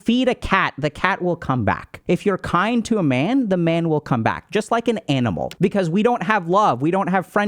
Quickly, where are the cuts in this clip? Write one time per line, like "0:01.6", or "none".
0:01.9
0:05.5